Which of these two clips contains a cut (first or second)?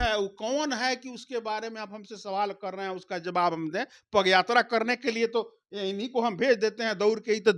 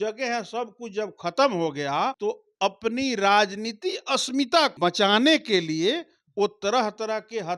second